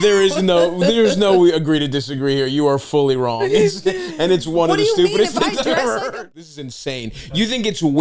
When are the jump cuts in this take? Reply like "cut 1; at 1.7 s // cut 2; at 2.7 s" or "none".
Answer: cut 1; at 6.1 s